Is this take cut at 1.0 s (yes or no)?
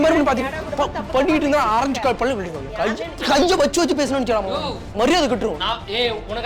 no